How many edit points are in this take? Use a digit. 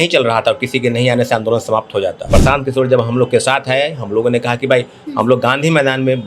1